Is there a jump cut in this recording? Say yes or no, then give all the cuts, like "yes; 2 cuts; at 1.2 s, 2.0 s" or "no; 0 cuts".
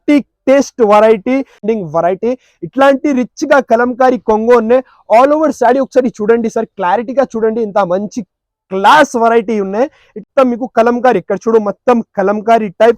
yes; 2 cuts; at 1.6 s, 10.1 s